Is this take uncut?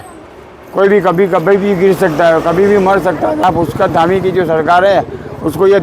no; 1 cut; at 3.4 s

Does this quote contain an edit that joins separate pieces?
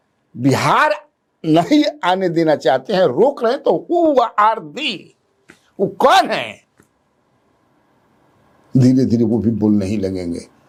no; 0 cuts

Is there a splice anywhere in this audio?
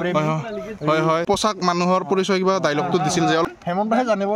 yes; 2 cuts; at 1.2 s, 3.4 s

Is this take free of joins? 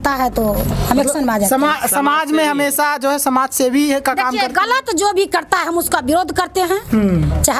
yes; 0 cuts

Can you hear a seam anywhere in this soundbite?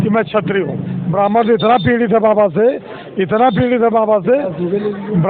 yes; 1 cut; at 0.9 s

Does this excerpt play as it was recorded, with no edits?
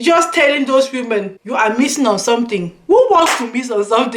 no; 1 cut; at 1.4 s

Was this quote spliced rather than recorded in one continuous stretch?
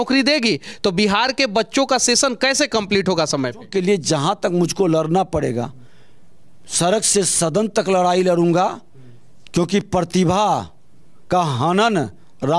yes; 1 cut; at 3.7 s

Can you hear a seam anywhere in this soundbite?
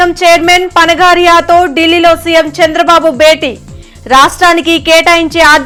no; 0 cuts

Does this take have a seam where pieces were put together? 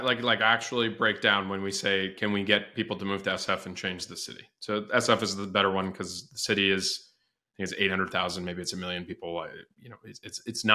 no; 0 cuts

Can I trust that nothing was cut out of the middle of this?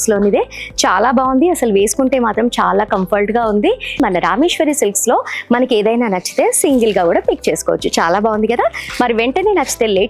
no; 1 cut; at 4.0 s

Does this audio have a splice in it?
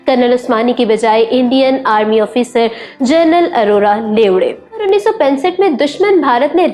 yes; 1 cut; at 4.8 s

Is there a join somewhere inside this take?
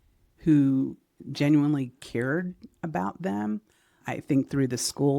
yes; 1 cut; at 4.0 s

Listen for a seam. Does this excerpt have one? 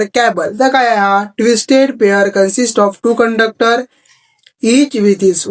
no; 0 cuts

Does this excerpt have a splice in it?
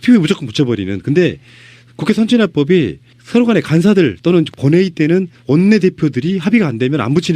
yes; 1 cut; at 4.5 s

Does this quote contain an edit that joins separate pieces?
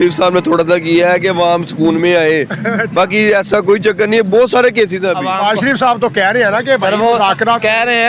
yes; 1 cut; at 5.2 s

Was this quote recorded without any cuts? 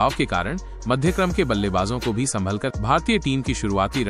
no; 1 cut; at 2.7 s

